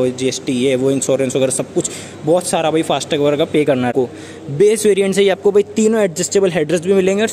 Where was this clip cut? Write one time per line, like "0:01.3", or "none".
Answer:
0:03.9